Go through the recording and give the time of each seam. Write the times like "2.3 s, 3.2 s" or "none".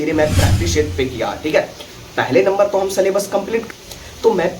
3.6 s